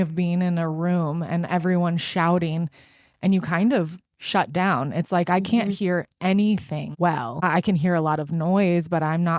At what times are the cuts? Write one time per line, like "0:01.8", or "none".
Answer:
0:06.8